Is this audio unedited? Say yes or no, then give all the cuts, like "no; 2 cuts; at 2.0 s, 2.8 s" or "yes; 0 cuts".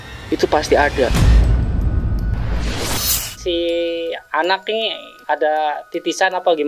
no; 3 cuts; at 1.1 s, 3.2 s, 5.1 s